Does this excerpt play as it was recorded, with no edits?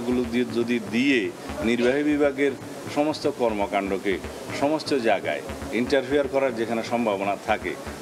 yes; 0 cuts

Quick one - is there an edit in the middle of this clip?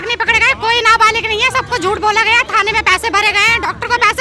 no; 0 cuts

